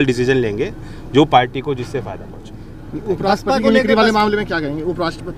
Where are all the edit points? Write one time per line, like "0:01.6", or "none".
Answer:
none

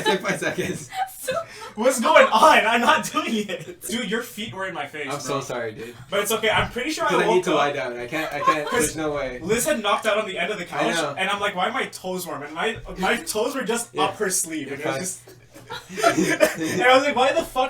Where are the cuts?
0:03.9

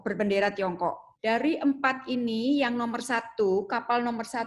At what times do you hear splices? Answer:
0:01.1

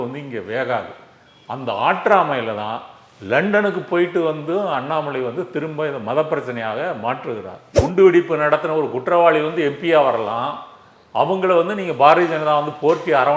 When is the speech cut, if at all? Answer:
0:07.8

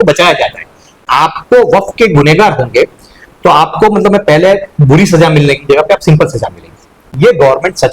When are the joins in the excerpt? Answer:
0:01.0
0:07.1

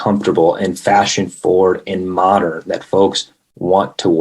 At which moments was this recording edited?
none

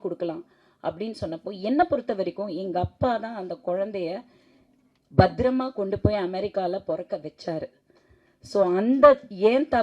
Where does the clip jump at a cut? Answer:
none

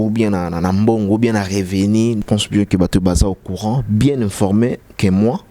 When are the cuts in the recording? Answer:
0:02.2

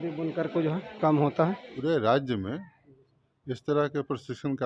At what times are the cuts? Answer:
0:01.6

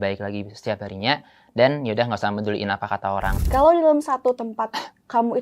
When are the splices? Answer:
0:03.4

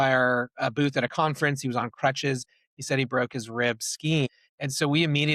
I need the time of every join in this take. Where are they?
0:04.3

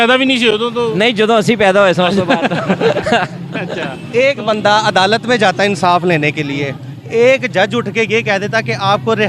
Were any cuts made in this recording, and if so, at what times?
0:03.8

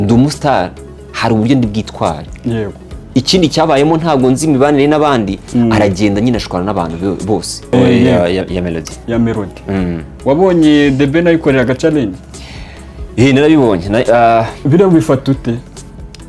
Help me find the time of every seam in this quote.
0:02.9
0:07.6

